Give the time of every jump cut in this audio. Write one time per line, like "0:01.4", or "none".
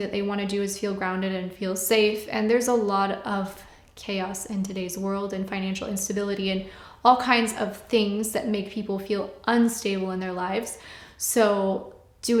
none